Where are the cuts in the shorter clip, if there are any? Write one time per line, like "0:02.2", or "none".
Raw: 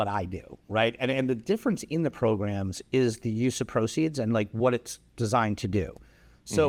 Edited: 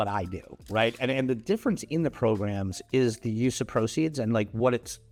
none